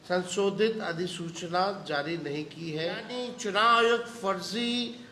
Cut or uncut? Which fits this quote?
cut